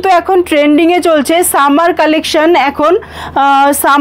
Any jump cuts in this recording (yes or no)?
no